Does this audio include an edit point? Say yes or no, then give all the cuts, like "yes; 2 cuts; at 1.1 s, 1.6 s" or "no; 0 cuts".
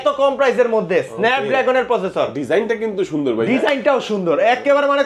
no; 0 cuts